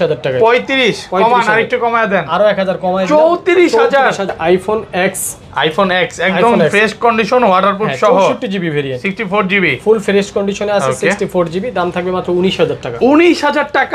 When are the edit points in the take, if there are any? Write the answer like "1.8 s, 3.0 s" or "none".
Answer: 4.3 s